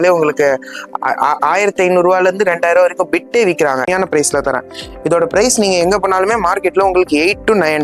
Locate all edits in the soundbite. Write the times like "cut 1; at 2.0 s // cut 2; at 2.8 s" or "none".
cut 1; at 3.9 s